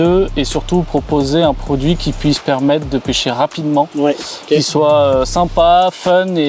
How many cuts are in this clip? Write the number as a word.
zero